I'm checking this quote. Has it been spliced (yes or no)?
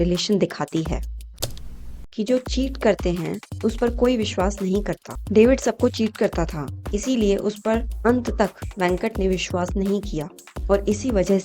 yes